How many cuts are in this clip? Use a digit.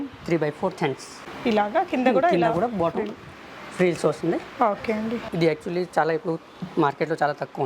1